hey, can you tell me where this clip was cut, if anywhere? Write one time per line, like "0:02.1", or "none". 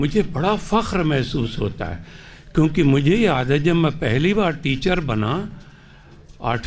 none